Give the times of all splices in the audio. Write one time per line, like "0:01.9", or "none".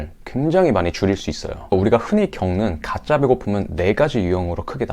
0:01.7